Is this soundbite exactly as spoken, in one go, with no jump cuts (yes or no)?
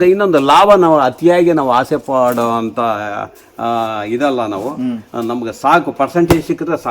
yes